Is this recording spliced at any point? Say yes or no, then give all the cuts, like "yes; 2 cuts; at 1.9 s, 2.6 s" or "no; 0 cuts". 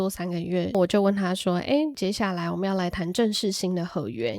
yes; 2 cuts; at 0.7 s, 1.9 s